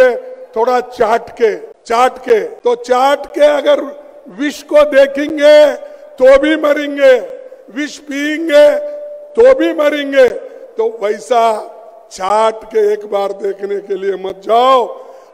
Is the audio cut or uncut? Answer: cut